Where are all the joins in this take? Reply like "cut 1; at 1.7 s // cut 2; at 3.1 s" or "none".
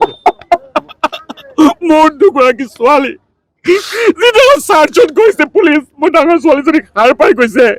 none

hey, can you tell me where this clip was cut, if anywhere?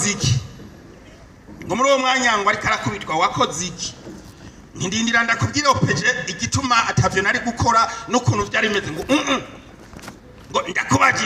none

